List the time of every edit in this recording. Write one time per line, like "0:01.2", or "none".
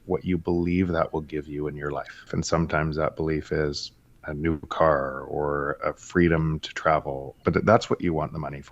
0:02.3
0:07.3